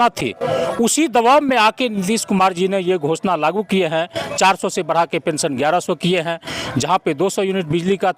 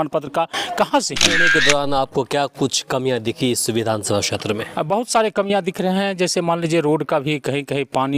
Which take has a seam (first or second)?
second